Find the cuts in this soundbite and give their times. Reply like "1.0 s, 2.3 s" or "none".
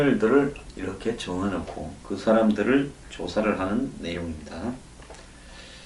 4.3 s